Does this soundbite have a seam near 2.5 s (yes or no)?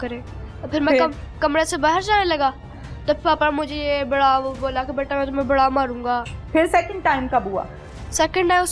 no